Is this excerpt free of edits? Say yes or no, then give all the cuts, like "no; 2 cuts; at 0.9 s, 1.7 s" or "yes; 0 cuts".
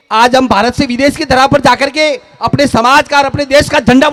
yes; 0 cuts